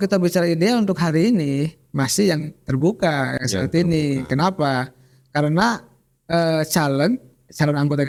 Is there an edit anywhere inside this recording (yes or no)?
no